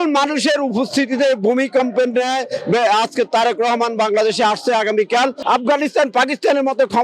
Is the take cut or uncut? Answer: cut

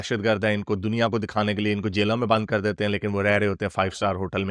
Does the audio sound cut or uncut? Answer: uncut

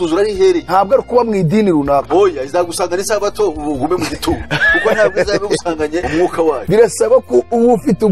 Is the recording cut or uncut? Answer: uncut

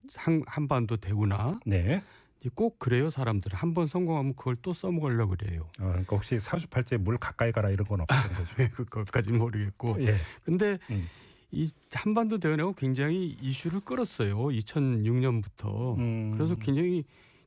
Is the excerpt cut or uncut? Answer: cut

